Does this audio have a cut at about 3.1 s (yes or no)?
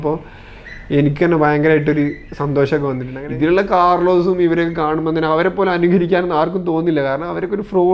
yes